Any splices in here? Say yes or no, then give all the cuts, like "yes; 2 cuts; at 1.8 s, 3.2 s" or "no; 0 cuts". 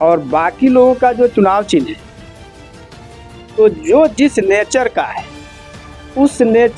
yes; 2 cuts; at 2.0 s, 3.5 s